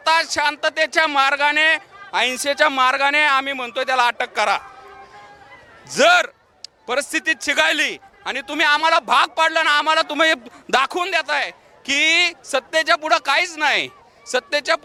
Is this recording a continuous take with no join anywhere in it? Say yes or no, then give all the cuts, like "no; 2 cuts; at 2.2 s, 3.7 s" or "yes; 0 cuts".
yes; 0 cuts